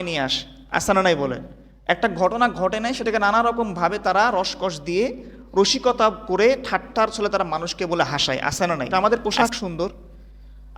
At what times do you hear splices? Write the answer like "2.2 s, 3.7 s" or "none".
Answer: 8.9 s